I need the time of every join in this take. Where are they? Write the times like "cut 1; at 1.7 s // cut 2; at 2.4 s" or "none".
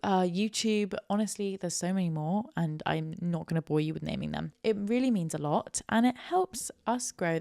cut 1; at 4.5 s